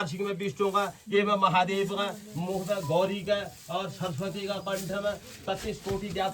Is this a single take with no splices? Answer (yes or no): yes